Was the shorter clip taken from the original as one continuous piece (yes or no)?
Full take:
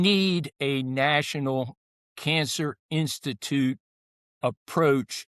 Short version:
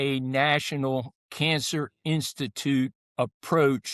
no